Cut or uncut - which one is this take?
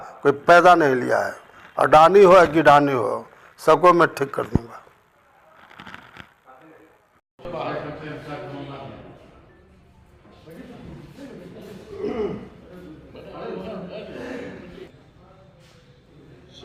uncut